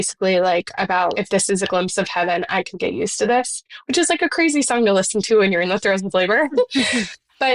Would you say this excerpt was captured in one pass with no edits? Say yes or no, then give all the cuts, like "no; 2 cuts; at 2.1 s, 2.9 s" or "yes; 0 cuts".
no; 1 cut; at 1.1 s